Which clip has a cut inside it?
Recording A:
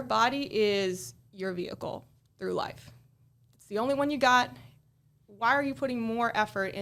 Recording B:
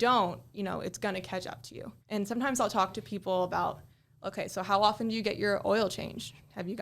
B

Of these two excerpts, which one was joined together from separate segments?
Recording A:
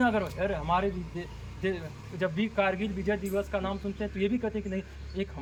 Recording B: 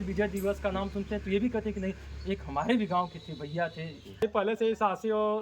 B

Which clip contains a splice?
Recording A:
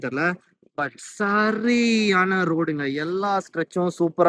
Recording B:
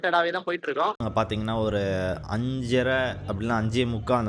B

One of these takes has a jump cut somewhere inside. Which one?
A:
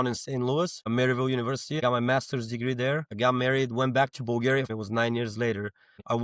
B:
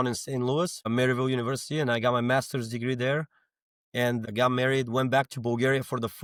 A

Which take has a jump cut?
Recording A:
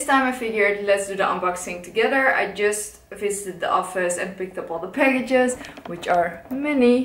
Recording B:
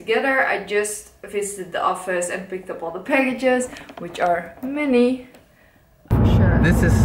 B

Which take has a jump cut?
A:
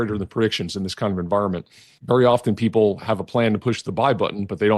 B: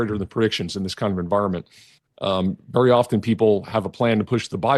A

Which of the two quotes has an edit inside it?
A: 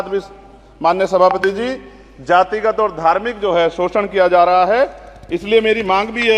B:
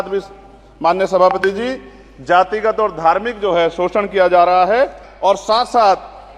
B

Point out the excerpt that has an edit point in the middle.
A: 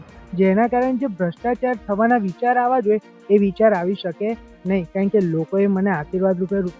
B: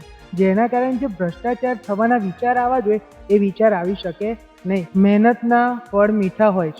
B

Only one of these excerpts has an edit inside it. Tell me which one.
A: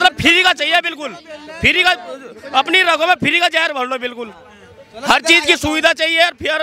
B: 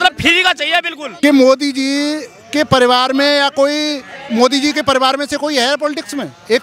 B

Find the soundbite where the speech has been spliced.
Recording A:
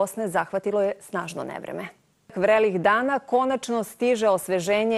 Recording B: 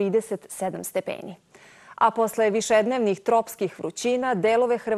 B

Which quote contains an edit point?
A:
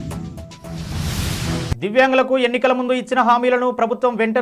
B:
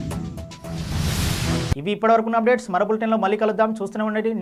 A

